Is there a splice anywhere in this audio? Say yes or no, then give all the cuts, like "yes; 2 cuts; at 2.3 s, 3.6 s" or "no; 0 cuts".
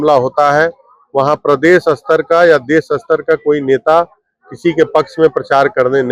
no; 0 cuts